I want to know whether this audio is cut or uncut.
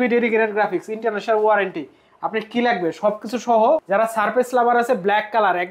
cut